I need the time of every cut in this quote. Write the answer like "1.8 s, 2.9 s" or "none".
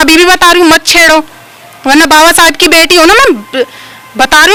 none